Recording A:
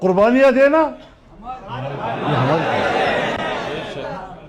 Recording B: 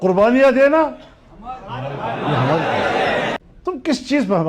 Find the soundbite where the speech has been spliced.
B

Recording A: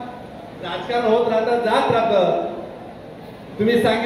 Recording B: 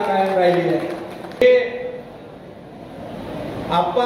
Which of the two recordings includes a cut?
B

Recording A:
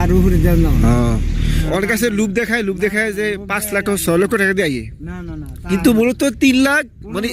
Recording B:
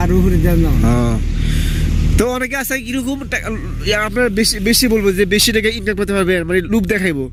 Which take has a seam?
A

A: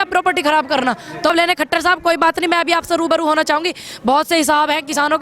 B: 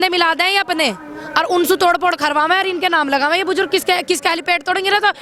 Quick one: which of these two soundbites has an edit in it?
A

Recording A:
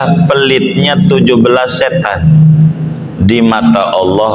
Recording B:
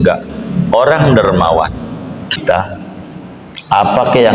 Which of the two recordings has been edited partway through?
B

